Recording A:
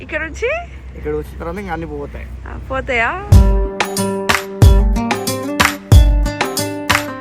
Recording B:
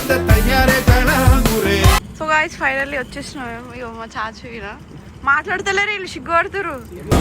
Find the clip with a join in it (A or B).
B